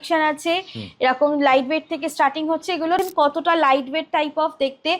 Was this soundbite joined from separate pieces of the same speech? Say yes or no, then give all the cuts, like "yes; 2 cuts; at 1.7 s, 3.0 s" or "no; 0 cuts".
yes; 1 cut; at 3.0 s